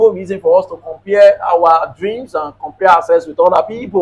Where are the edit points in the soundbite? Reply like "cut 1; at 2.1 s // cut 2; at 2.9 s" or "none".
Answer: none

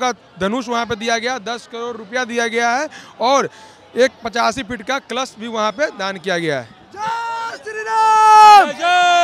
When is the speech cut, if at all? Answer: none

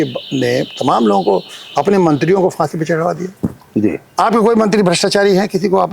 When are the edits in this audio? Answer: none

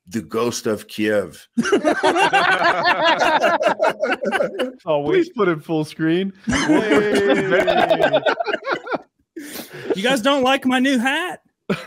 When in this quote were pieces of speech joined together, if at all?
cut 1; at 4.8 s

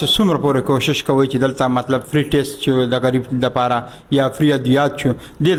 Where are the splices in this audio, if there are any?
none

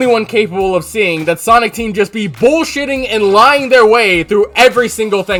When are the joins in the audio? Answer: none

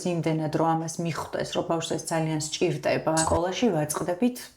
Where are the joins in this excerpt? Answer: cut 1; at 3.3 s

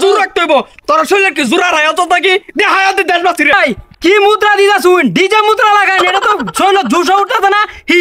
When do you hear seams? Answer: cut 1; at 3.5 s

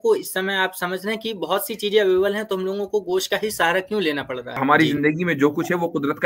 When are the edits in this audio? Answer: cut 1; at 4.6 s

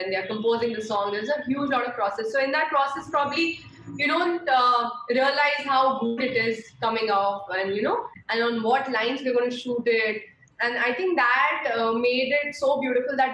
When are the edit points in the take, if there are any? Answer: cut 1; at 8.2 s

